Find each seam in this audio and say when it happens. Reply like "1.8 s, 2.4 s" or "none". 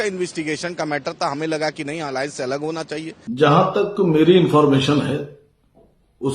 3.2 s